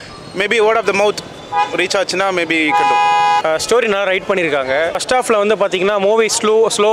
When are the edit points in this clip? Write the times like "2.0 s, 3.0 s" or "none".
3.4 s, 5.0 s

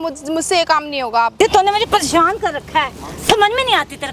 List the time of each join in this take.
1.3 s

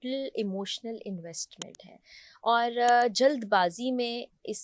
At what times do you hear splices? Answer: none

